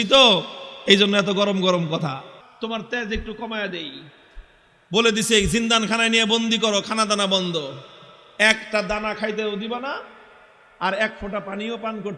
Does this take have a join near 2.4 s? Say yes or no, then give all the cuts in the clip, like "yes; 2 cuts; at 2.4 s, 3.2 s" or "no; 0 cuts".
yes; 1 cut; at 2.4 s